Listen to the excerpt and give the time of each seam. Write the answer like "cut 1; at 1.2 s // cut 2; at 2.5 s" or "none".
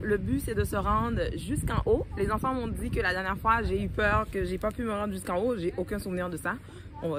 none